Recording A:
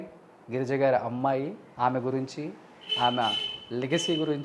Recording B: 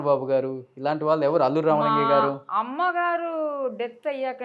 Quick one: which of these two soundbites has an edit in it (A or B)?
A